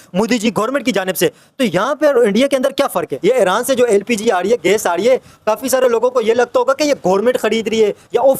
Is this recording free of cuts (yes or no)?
no